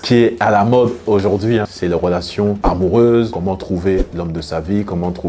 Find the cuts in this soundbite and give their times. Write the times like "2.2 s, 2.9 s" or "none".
none